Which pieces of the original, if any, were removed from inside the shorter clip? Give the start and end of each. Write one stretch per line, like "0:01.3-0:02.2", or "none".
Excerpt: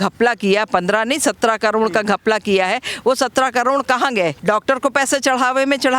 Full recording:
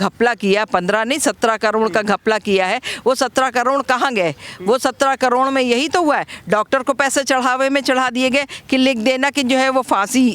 0:04.4-0:06.4